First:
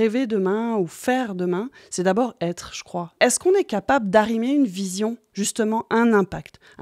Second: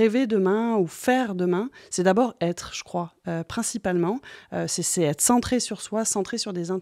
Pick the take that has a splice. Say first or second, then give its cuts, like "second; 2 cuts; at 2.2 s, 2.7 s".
first; 1 cut; at 3.1 s